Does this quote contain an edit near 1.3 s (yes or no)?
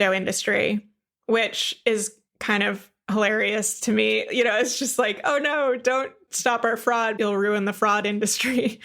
no